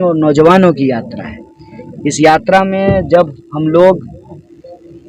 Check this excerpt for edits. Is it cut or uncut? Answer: uncut